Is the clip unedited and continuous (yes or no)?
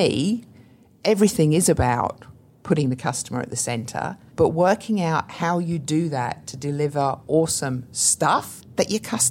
no